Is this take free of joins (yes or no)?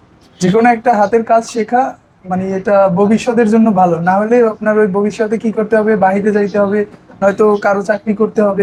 yes